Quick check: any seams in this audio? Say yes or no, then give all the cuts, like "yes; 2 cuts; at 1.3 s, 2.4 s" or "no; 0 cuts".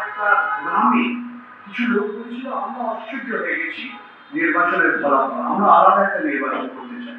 no; 0 cuts